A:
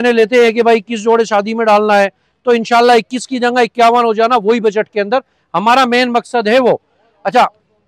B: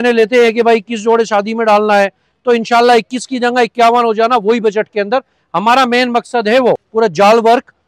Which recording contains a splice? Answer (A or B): B